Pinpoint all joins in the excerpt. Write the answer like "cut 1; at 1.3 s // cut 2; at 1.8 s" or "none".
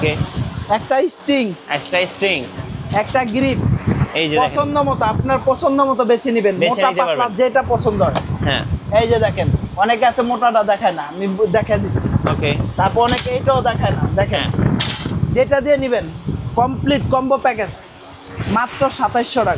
none